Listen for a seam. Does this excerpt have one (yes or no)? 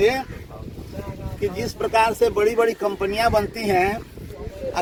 no